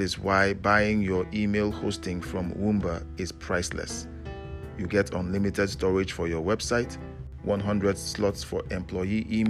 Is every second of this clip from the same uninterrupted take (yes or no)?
yes